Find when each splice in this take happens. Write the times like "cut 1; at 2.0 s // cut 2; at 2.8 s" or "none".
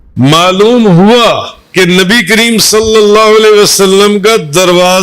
cut 1; at 1.5 s